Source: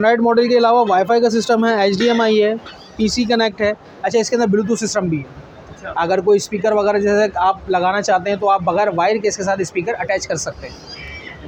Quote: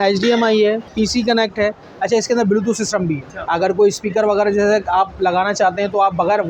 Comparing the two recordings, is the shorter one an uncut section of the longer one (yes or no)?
no